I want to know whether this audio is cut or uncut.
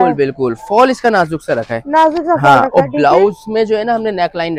uncut